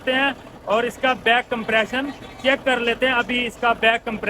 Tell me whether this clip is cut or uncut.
uncut